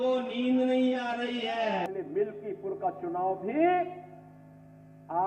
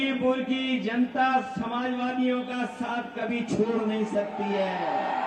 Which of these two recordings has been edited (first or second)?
first